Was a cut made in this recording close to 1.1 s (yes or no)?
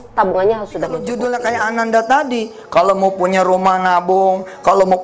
yes